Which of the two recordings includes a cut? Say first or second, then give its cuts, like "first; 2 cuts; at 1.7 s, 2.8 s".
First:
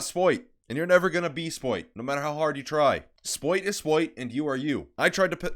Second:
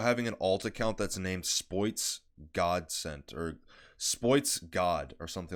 first; 1 cut; at 1.9 s